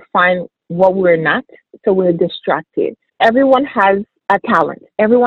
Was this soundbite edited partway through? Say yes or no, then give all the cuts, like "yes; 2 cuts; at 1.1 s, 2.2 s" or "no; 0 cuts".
yes; 1 cut; at 4.1 s